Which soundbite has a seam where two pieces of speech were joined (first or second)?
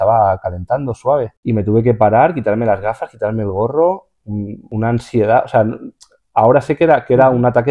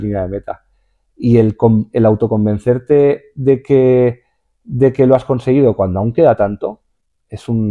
first